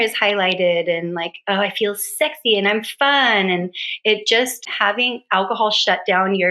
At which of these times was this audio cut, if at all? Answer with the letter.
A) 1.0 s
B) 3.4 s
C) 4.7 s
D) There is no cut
C